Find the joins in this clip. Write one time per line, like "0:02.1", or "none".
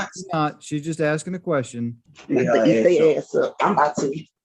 0:02.0